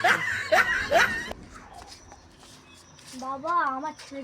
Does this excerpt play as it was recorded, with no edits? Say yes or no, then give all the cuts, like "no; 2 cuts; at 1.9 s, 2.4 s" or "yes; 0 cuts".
no; 1 cut; at 1.2 s